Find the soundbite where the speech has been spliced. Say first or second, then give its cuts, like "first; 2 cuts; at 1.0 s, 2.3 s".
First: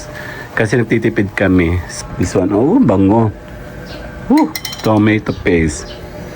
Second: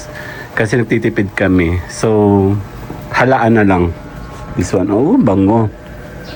first; 1 cut; at 1.9 s